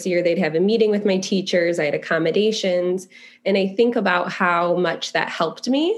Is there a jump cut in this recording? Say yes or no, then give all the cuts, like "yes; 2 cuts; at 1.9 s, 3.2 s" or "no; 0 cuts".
no; 0 cuts